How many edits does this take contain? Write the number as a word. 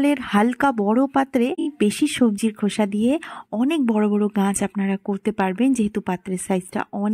one